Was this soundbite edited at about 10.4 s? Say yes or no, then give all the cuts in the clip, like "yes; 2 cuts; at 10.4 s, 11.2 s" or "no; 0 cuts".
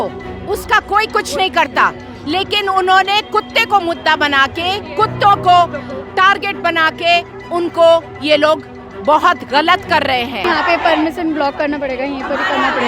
yes; 1 cut; at 10.4 s